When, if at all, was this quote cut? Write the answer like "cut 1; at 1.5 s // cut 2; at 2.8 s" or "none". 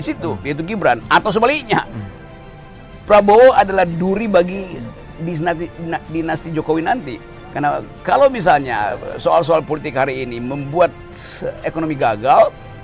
none